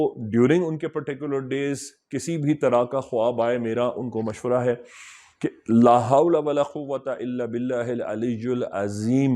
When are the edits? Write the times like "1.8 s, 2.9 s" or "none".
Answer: none